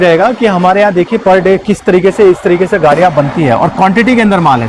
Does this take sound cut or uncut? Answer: uncut